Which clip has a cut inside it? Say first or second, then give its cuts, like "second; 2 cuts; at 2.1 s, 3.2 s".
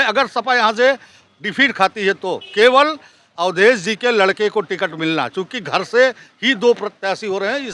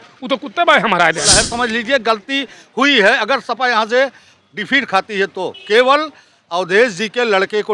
second; 1 cut; at 1.4 s